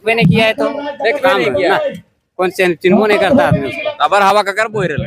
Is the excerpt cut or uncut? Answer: cut